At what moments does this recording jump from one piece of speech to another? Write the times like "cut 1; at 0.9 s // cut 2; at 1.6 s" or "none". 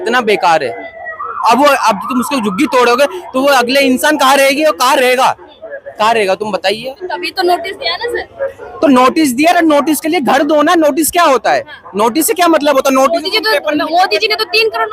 none